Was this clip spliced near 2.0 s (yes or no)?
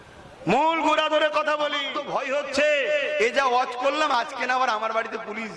yes